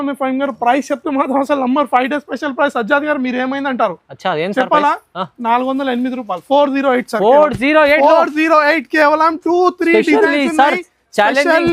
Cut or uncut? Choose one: uncut